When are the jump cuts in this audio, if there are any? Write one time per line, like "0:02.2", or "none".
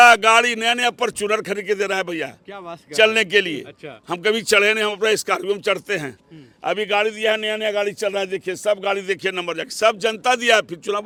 none

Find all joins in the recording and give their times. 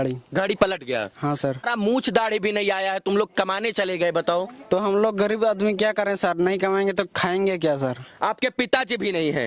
0:01.7

